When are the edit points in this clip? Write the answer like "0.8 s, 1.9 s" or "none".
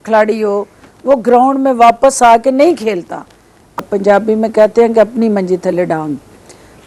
3.8 s